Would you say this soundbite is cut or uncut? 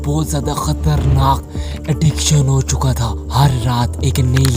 uncut